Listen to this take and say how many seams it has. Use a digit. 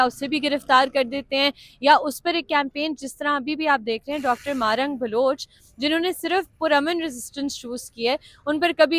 0